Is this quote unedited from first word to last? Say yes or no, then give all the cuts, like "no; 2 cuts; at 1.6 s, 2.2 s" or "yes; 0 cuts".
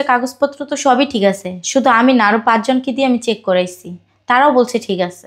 yes; 0 cuts